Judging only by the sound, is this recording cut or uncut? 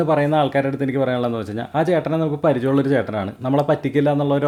uncut